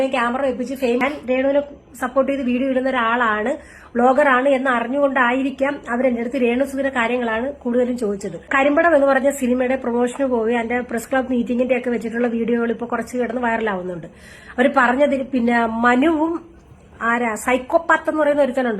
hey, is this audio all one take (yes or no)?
no